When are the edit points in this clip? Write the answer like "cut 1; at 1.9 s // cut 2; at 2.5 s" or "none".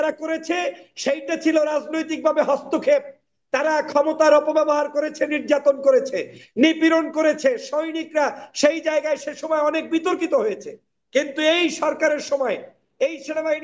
none